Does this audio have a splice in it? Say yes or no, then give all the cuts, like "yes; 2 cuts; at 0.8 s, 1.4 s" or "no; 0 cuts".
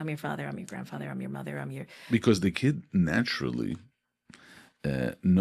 no; 0 cuts